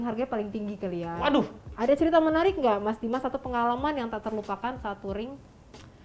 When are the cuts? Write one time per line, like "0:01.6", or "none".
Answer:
0:01.7